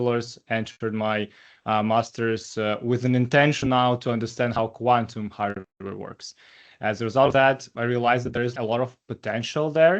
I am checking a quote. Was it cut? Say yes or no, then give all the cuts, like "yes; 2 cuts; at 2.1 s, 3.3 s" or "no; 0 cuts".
yes; 1 cut; at 8.5 s